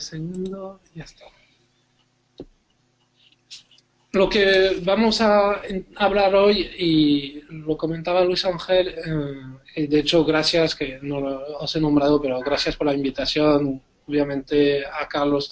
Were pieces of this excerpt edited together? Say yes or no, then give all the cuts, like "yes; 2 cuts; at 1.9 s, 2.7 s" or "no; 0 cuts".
no; 0 cuts